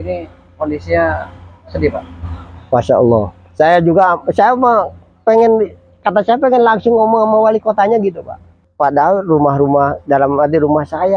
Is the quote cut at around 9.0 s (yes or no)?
yes